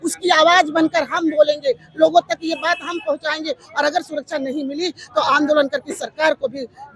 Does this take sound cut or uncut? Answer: uncut